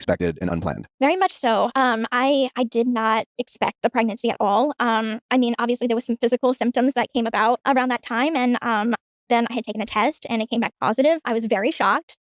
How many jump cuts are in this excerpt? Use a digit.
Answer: 0